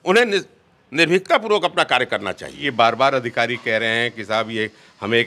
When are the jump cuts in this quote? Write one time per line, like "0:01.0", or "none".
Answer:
0:02.6